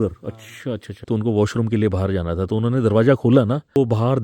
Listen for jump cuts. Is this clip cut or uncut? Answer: cut